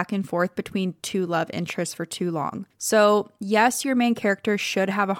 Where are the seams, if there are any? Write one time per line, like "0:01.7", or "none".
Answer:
0:02.7